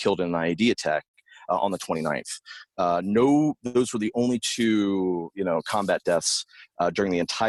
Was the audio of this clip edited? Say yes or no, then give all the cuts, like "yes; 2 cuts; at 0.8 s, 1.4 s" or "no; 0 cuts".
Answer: no; 0 cuts